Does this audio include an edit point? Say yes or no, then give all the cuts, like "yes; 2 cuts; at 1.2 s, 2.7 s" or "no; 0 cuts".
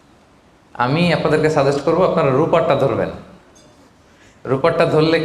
no; 0 cuts